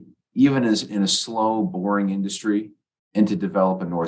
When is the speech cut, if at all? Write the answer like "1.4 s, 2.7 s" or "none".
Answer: none

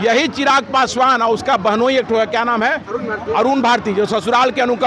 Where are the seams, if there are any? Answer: none

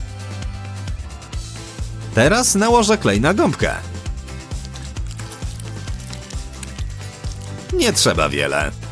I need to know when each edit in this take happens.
1.0 s

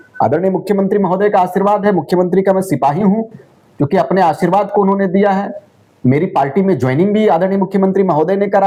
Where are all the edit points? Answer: none

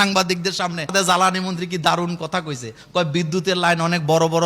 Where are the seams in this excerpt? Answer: 0.9 s

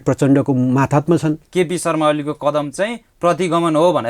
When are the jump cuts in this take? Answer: 1.4 s

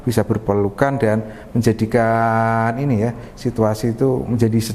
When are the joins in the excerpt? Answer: none

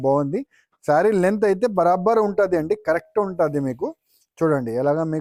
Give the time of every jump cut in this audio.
none

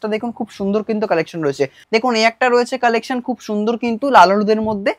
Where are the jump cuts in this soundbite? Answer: 1.8 s

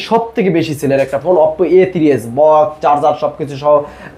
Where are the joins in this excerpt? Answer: none

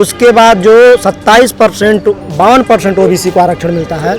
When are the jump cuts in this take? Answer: none

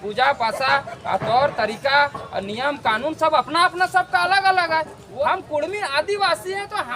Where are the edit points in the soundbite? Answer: 5.0 s

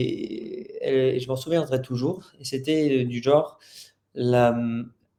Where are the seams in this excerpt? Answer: none

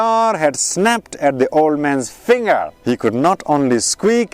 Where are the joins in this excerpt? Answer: 2.7 s

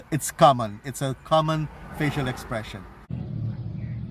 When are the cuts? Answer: 3.1 s

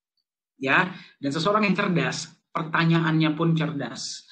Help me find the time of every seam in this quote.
none

